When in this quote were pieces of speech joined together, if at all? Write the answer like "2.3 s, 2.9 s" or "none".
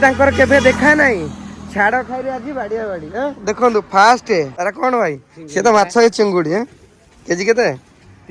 4.5 s